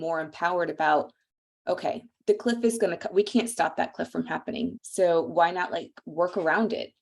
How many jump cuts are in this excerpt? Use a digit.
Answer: 1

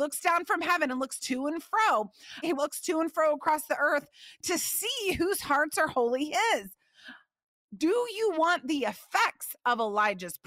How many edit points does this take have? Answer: 1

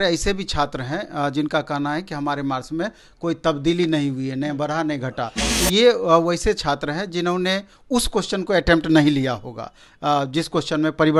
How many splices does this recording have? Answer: 0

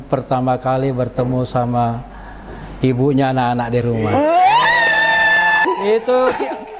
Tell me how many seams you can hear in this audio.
1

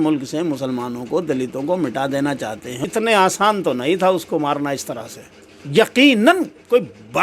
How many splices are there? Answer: 1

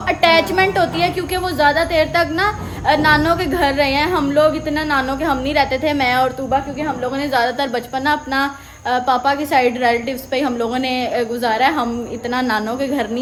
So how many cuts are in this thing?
0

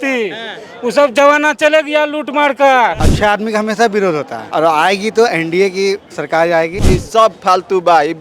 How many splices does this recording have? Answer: 3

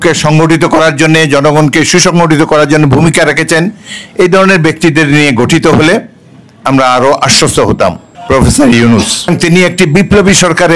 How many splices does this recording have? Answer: 2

